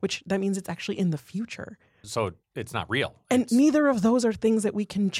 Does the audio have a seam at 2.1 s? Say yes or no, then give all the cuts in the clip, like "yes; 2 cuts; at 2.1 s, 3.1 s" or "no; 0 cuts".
yes; 1 cut; at 2.1 s